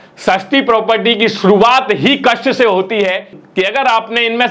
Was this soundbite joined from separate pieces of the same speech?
yes; 1 cut; at 3.3 s

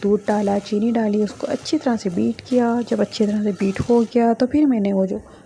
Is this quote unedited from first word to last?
yes; 0 cuts

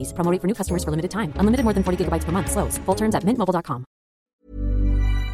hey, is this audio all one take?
no; 1 cut; at 4.4 s

